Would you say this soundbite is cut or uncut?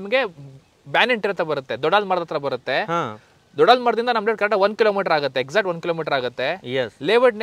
uncut